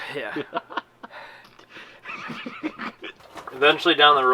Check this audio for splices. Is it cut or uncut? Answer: cut